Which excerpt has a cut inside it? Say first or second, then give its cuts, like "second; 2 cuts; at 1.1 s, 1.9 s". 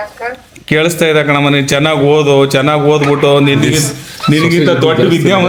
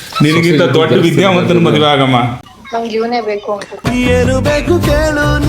second; 1 cut; at 2.4 s